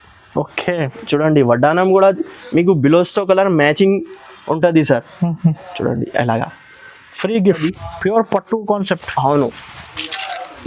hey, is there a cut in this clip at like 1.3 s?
no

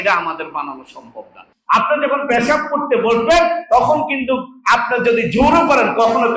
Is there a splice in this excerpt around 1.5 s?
no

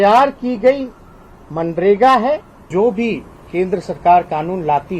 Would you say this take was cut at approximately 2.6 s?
yes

